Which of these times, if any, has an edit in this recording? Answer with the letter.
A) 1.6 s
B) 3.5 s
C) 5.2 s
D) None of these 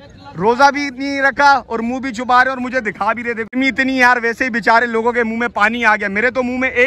B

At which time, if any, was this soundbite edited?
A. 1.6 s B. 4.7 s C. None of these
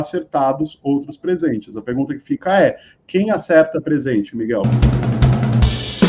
B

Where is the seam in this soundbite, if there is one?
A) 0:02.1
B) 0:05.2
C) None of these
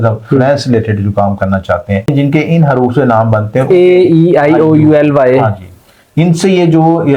A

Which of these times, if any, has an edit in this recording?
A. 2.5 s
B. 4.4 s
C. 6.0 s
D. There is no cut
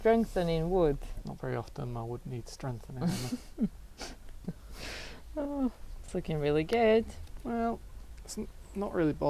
D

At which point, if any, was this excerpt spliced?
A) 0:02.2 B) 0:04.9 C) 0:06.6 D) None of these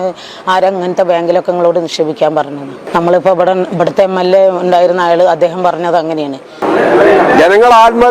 C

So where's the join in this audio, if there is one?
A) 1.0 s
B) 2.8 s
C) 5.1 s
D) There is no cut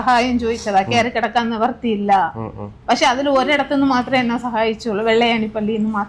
D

